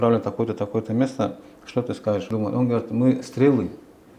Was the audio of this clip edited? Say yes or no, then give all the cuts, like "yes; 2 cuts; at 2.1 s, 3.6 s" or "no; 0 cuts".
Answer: yes; 1 cut; at 2.3 s